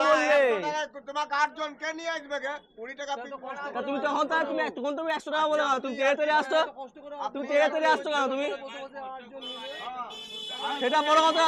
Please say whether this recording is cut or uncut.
uncut